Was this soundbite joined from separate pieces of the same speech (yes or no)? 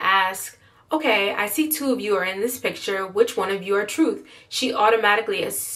no